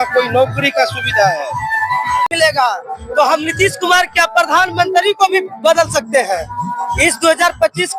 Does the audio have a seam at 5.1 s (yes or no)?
no